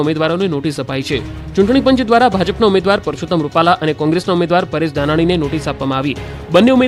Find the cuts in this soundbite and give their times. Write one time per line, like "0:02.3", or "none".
none